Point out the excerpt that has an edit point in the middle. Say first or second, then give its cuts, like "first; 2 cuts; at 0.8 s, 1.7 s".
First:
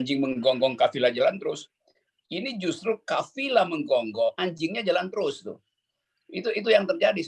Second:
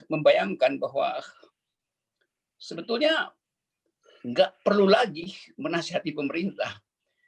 first; 1 cut; at 4.4 s